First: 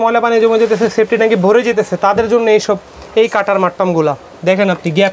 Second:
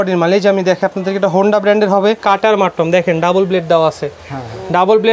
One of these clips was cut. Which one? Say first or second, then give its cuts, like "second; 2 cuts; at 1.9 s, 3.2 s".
second; 1 cut; at 2.2 s